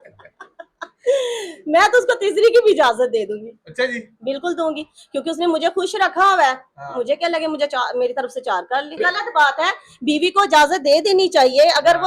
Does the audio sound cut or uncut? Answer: cut